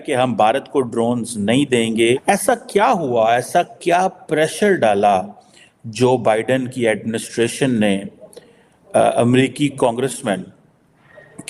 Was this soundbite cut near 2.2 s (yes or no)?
yes